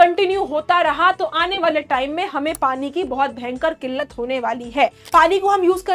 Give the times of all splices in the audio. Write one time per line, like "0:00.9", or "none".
0:05.0